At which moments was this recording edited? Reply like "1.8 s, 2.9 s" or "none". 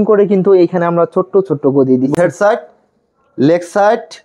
2.1 s